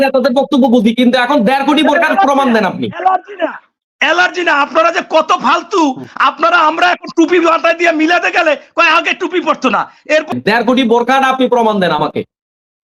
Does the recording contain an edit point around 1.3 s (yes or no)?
no